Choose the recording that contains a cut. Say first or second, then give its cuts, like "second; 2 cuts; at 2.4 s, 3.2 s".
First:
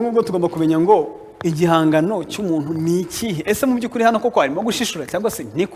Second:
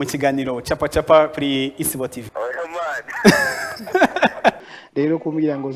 second; 2 cuts; at 2.2 s, 4.6 s